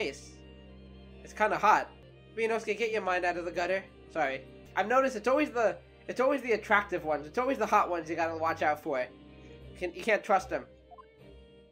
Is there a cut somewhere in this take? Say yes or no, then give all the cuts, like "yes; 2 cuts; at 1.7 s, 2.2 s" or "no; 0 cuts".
yes; 1 cut; at 4.5 s